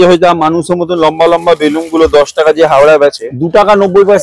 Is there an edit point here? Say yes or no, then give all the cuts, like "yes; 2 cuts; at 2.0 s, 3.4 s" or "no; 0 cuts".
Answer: yes; 1 cut; at 3.3 s